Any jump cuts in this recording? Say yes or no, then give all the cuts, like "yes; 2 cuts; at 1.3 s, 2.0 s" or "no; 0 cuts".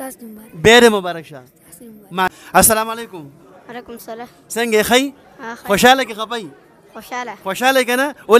yes; 1 cut; at 2.3 s